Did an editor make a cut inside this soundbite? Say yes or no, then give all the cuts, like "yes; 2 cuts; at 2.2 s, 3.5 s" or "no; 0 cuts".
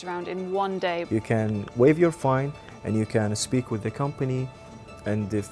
yes; 1 cut; at 1.0 s